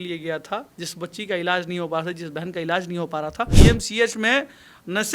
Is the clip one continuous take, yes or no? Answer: no